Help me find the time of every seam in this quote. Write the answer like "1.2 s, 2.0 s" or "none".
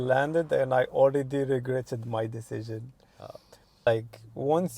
3.9 s